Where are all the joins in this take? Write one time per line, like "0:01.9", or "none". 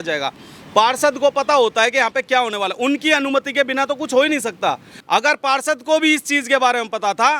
0:04.9